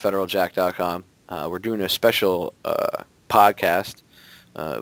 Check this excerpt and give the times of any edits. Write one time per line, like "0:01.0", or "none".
none